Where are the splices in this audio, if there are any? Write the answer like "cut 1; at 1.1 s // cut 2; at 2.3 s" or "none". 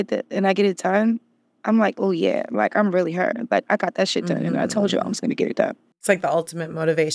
cut 1; at 6.0 s